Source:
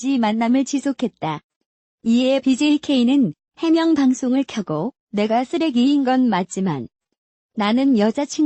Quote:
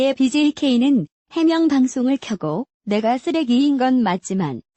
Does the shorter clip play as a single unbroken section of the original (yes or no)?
yes